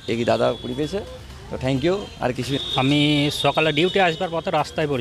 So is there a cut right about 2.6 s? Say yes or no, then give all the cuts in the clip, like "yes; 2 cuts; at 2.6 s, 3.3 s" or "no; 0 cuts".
yes; 1 cut; at 2.6 s